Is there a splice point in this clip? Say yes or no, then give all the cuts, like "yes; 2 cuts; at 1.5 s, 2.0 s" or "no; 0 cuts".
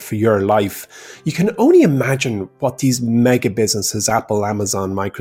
no; 0 cuts